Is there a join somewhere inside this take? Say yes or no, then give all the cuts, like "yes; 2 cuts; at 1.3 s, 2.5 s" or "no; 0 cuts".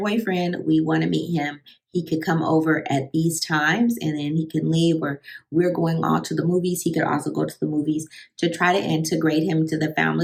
no; 0 cuts